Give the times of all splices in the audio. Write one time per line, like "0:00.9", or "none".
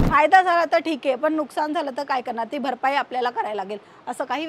none